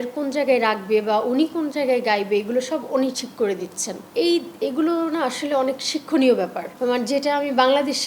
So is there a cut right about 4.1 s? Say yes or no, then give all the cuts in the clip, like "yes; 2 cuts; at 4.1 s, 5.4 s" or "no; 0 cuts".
no; 0 cuts